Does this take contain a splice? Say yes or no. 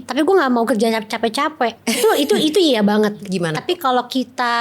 yes